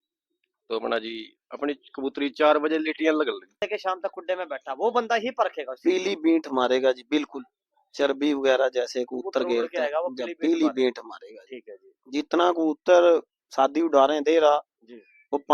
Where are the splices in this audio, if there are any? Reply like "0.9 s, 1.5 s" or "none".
3.6 s

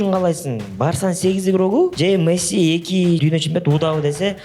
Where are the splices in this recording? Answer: 1.9 s, 3.2 s

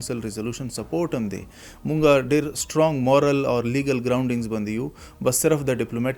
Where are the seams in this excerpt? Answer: none

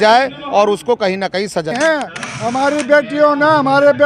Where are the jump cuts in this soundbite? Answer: 1.7 s

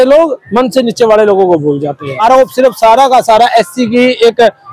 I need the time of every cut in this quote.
2.1 s

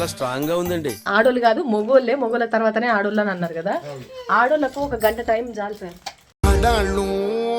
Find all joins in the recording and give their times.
1.1 s

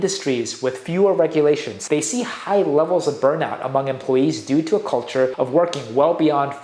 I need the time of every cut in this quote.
1.7 s, 5.3 s

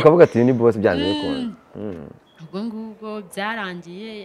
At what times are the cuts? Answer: none

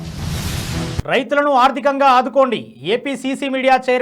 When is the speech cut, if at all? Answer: 1.0 s

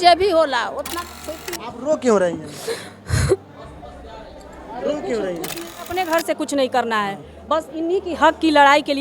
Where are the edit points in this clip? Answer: 1.1 s, 6.0 s

